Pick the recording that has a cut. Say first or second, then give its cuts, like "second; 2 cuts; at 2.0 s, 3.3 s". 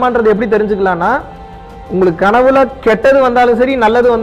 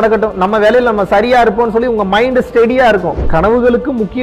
second; 1 cut; at 3.2 s